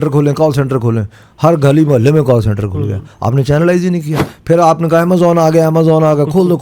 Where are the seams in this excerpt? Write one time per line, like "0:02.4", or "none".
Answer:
0:04.2